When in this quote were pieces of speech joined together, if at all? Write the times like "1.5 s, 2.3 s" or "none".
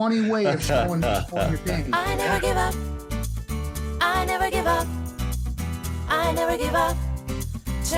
1.9 s